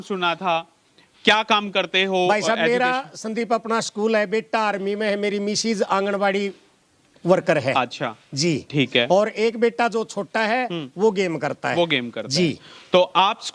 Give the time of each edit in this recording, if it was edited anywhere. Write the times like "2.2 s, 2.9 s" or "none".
none

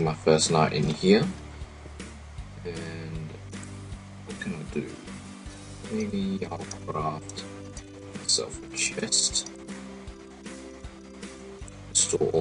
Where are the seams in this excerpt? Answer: 3.0 s

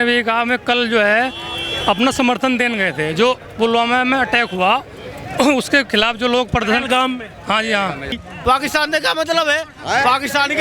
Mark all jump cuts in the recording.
8.1 s

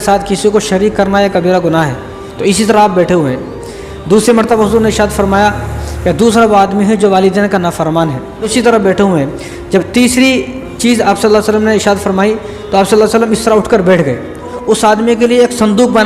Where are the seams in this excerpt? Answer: 8.5 s, 14.5 s

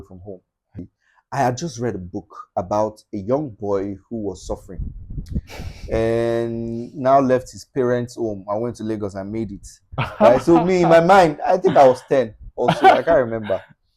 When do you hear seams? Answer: 1.0 s

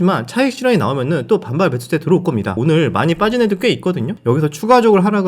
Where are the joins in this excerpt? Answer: 2.5 s, 4.1 s

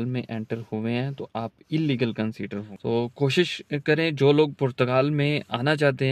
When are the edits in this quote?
2.7 s

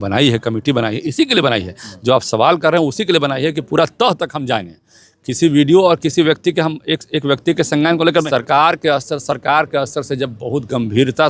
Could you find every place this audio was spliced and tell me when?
8.3 s

